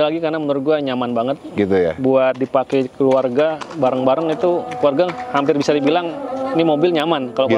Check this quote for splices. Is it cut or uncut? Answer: uncut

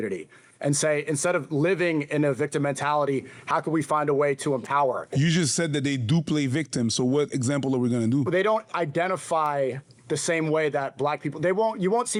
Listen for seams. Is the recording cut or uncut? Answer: uncut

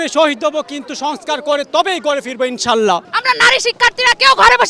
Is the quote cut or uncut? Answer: cut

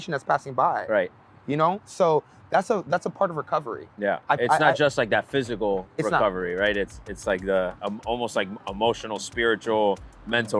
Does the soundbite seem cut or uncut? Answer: uncut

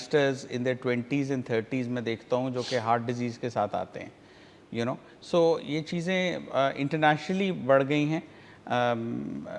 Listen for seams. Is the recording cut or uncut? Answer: uncut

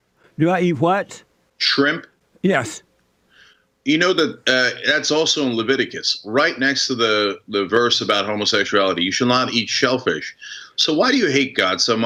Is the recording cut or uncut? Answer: uncut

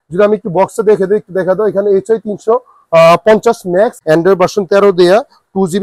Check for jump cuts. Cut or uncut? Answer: cut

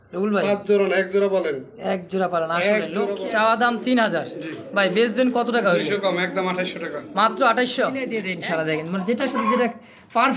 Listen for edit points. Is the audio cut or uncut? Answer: cut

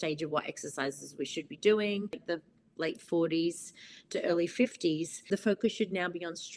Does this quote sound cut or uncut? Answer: cut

